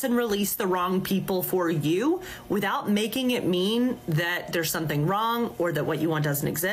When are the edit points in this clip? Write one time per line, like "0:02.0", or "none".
none